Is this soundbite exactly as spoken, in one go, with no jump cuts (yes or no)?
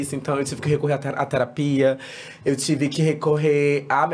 yes